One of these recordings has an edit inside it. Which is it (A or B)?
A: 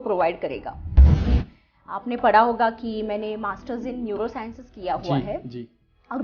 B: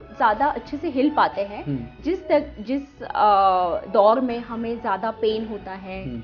A